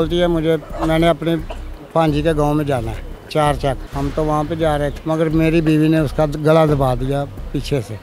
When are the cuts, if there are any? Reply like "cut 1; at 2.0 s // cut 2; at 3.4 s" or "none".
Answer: cut 1; at 3.9 s // cut 2; at 5.0 s